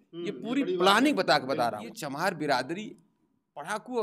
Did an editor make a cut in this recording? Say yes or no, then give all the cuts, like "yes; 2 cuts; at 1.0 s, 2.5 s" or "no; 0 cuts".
yes; 1 cut; at 1.9 s